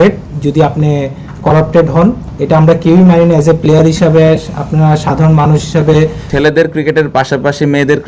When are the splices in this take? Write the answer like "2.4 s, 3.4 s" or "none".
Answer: 6.2 s